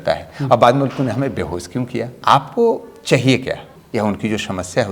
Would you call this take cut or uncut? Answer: cut